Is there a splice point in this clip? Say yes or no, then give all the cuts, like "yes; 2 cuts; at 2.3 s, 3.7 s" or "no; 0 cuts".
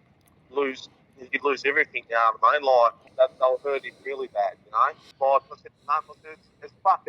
yes; 2 cuts; at 3.0 s, 5.0 s